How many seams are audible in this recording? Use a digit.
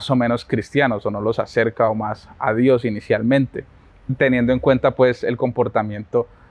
0